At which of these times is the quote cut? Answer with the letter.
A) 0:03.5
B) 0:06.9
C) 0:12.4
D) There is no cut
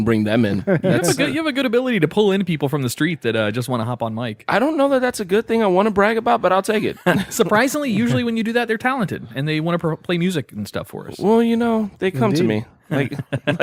D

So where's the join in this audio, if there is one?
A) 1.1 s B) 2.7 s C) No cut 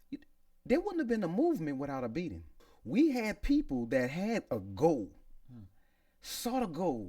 B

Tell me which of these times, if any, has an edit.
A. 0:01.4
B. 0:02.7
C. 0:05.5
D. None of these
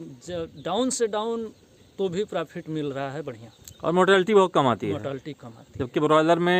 D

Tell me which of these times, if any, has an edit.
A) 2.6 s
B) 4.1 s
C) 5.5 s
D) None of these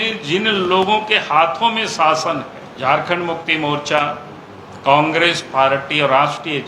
A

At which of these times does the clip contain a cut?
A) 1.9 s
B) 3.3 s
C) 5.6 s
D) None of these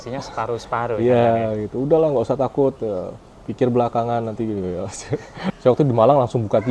C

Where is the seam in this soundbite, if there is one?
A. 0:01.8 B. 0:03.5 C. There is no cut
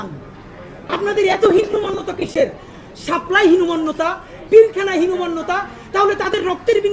C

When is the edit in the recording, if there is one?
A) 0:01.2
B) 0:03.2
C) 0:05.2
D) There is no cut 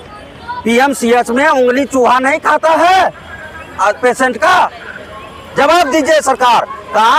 D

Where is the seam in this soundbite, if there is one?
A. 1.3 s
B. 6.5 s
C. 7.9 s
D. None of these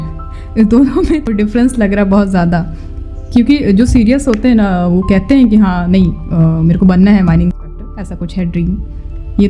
A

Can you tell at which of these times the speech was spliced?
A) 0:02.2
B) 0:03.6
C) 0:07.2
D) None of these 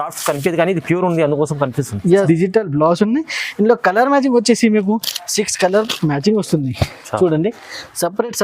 A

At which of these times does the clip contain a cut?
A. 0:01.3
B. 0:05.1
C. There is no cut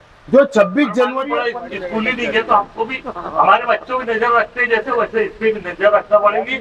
A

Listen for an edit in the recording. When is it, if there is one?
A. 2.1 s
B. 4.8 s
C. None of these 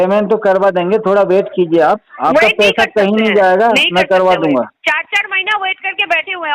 C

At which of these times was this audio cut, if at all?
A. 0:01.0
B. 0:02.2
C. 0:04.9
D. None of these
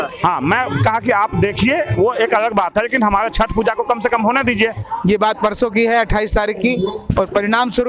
C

